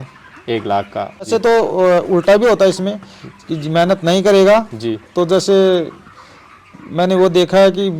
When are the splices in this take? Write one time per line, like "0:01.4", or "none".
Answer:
0:01.3